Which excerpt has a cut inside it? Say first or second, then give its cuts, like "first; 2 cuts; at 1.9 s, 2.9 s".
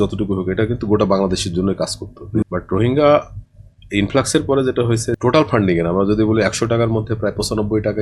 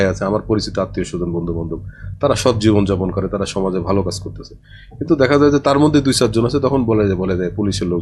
first; 2 cuts; at 2.4 s, 5.2 s